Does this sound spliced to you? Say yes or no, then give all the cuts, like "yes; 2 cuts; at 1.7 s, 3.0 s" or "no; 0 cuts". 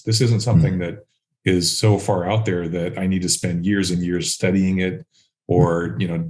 no; 0 cuts